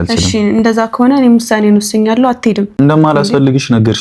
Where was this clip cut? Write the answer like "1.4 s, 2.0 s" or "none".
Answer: 2.7 s